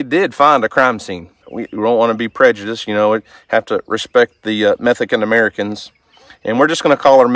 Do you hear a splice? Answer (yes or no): yes